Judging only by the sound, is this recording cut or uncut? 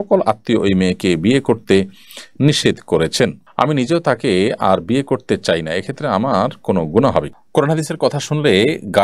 cut